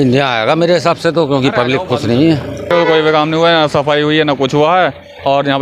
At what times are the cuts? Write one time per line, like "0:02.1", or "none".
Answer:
0:02.7